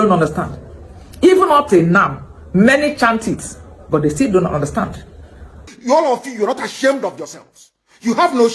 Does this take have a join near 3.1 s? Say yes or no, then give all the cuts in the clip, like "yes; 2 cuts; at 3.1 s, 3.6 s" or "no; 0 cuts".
no; 1 cut; at 5.7 s